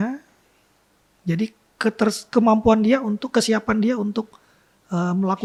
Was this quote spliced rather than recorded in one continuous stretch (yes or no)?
no